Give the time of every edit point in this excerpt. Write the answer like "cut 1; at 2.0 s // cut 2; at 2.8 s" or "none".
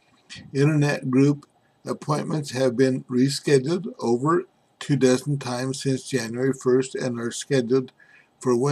none